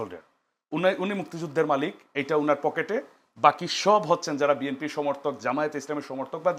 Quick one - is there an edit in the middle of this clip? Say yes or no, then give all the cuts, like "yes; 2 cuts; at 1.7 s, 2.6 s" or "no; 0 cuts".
no; 0 cuts